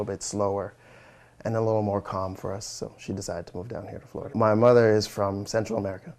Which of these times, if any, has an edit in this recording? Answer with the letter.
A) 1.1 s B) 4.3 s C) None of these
B